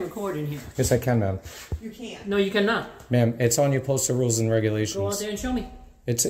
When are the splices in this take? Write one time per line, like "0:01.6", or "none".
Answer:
none